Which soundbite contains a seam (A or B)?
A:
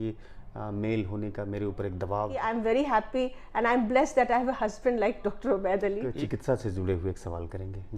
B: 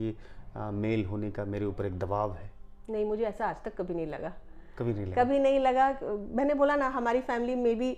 A